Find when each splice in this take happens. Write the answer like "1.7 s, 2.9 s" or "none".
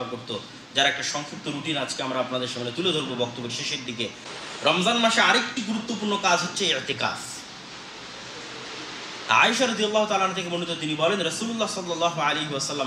4.3 s